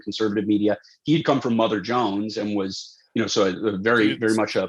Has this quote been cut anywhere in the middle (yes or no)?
no